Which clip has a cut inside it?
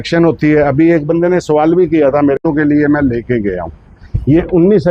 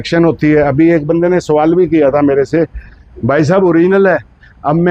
first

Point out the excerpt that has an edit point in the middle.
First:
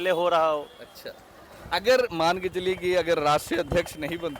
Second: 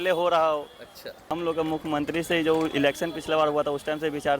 second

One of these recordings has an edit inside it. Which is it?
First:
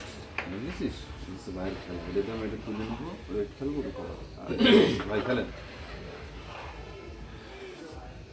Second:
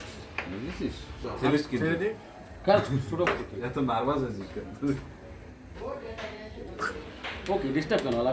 second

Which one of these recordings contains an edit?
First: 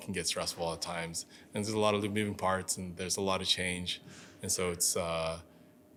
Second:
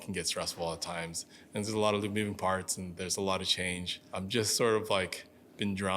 second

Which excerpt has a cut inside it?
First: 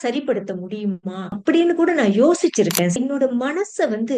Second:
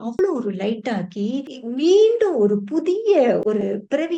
first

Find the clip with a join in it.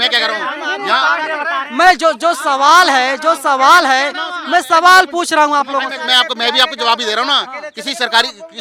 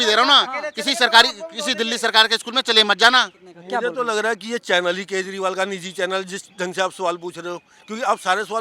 second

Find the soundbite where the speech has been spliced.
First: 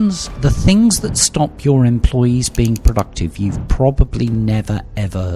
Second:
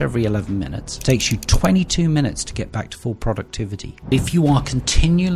second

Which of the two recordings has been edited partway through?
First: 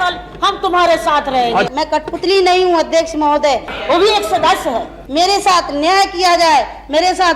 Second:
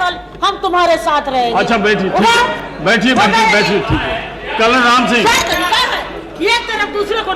first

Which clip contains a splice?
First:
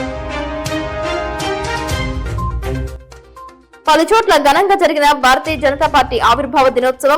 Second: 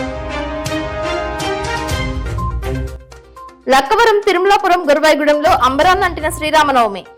first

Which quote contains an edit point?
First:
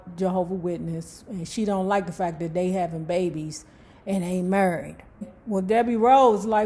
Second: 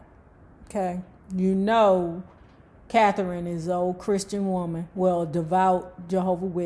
first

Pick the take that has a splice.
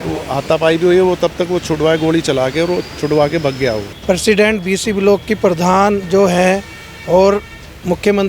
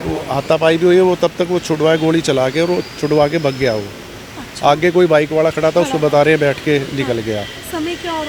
first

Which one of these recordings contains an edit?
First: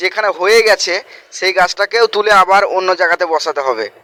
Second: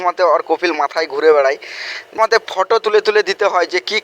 second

